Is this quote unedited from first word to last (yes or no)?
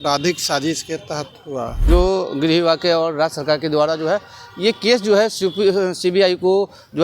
no